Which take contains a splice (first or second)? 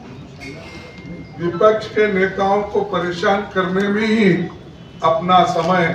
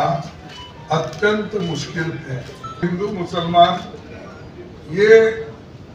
second